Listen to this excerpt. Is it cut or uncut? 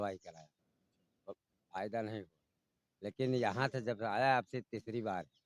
uncut